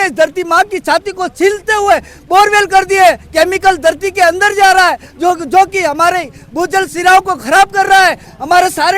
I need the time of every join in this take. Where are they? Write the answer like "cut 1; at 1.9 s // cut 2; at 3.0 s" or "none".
none